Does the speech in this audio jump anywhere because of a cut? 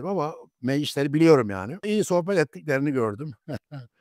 yes; 1 cut; at 1.8 s

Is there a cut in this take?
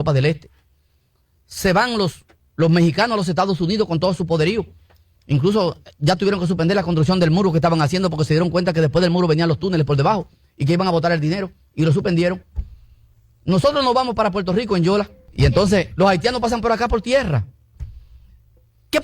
yes; 1 cut; at 17.5 s

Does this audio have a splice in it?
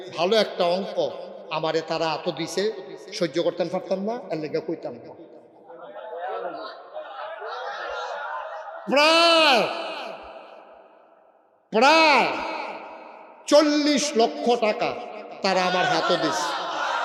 no; 0 cuts

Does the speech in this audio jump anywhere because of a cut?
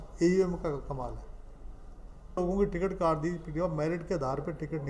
yes; 1 cut; at 2.4 s

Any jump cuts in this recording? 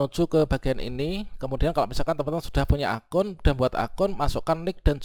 no; 0 cuts

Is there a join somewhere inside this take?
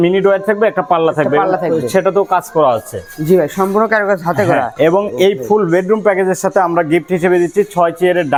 no; 0 cuts

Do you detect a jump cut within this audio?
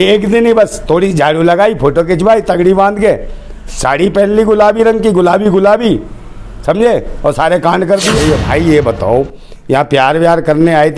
yes; 1 cut; at 8.2 s

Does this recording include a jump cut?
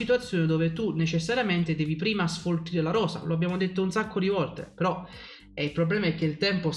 no; 0 cuts

